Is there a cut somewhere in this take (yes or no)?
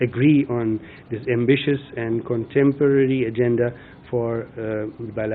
no